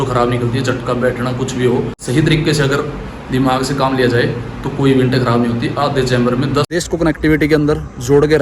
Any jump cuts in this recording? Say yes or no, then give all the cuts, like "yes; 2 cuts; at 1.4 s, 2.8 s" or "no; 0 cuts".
yes; 2 cuts; at 2.0 s, 6.7 s